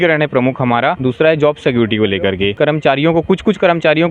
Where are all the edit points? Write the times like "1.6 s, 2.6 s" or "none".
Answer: 1.0 s, 2.5 s